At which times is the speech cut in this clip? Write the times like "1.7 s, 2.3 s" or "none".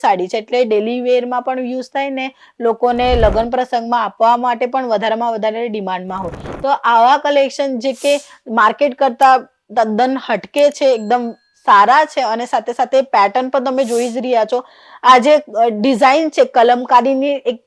none